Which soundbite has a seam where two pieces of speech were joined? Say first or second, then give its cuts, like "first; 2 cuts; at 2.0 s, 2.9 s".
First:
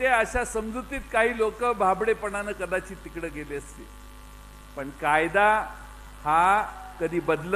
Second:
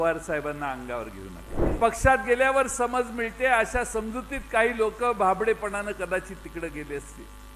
second; 1 cut; at 1.7 s